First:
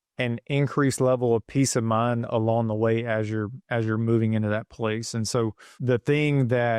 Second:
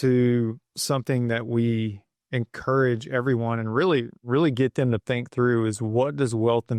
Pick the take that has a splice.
first; 1 cut; at 5.7 s

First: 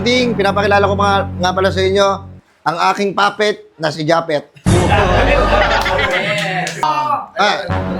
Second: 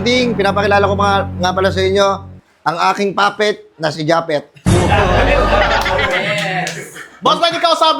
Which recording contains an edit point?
first; 1 cut; at 6.8 s

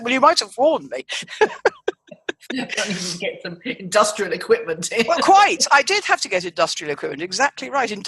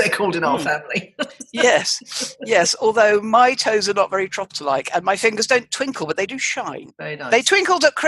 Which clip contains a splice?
second; 1 cut; at 6.9 s

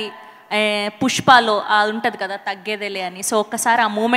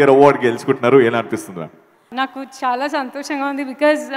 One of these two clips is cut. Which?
second; 1 cut; at 2.1 s

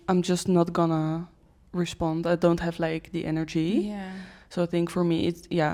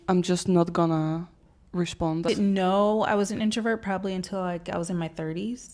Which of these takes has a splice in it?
second; 1 cut; at 2.3 s

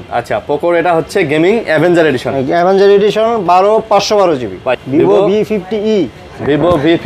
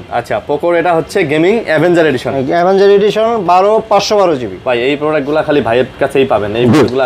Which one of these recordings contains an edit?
first; 1 cut; at 4.8 s

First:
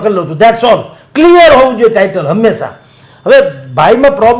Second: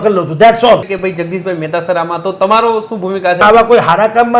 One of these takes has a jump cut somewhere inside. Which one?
second; 2 cuts; at 1.0 s, 3.4 s

